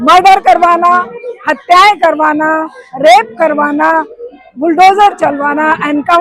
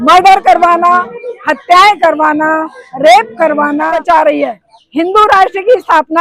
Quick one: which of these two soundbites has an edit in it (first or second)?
second